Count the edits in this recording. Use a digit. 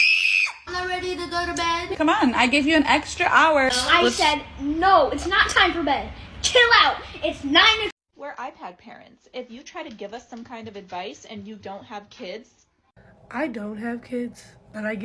1